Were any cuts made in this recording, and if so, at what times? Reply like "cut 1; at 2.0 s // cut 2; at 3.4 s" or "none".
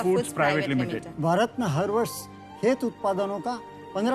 cut 1; at 1.1 s